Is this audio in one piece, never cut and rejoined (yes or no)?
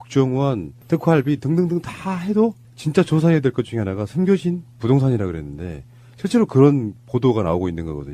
no